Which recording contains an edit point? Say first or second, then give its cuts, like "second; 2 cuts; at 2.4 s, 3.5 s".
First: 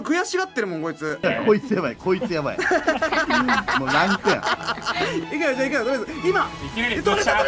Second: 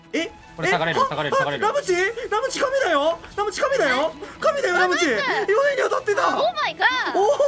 first; 2 cuts; at 1.2 s, 5.2 s